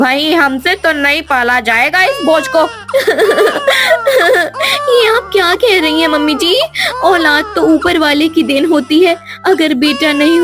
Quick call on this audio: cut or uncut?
cut